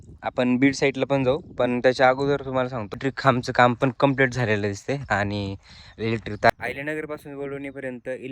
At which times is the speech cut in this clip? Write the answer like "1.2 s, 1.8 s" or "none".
3.0 s, 6.5 s